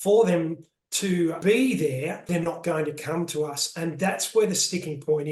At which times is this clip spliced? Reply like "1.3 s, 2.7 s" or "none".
1.4 s, 2.2 s